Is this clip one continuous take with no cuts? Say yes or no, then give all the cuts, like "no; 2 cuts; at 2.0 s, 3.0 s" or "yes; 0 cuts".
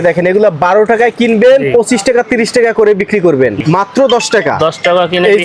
no; 1 cut; at 3.6 s